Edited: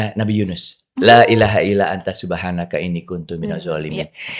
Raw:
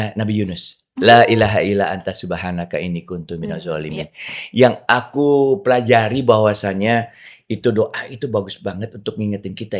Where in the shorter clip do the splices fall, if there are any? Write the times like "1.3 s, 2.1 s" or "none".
none